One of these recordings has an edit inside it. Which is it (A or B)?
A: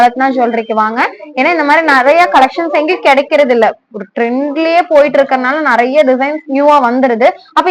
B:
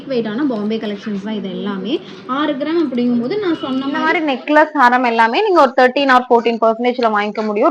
B